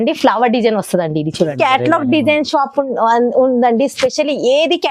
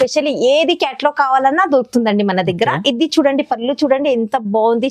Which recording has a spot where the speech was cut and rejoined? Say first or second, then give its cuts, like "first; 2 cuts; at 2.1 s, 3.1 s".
first; 1 cut; at 1.5 s